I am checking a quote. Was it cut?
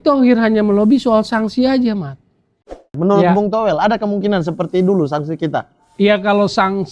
yes; 1 cut; at 2.9 s

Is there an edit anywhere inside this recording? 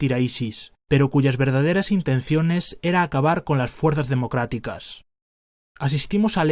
no; 0 cuts

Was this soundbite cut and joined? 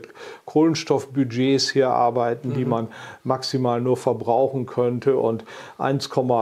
no; 0 cuts

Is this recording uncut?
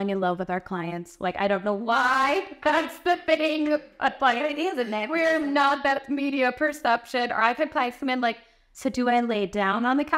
yes; 0 cuts

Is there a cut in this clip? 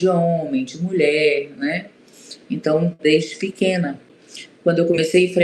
yes; 1 cut; at 4.1 s

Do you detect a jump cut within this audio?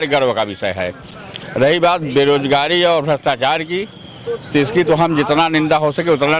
no; 0 cuts

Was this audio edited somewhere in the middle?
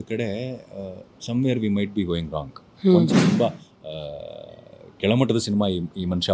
yes; 1 cut; at 3.1 s

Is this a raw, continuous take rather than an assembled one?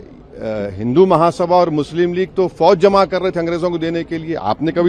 yes; 0 cuts

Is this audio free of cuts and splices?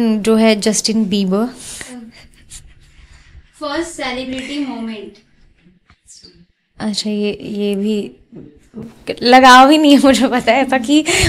yes; 0 cuts

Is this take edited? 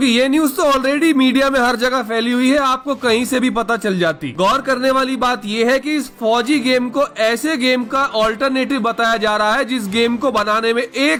no; 0 cuts

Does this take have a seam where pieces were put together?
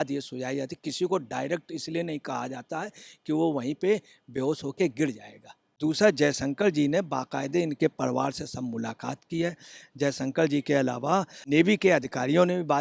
yes; 2 cuts; at 5.8 s, 11.4 s

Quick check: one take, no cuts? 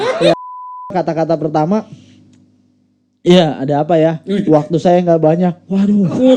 no; 1 cut; at 0.9 s

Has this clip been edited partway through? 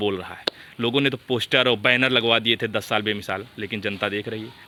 no; 0 cuts

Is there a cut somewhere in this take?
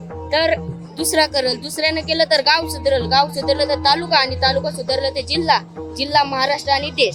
no; 0 cuts

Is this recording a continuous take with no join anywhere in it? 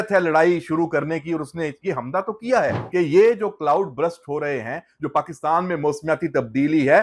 no; 1 cut; at 2.8 s

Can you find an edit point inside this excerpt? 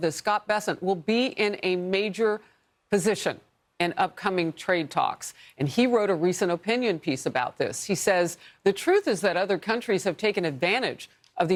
no; 0 cuts

